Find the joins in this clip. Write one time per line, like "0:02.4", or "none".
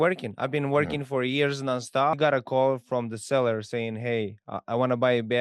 0:02.1